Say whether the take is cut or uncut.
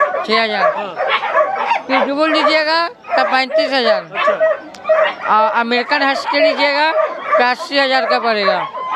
uncut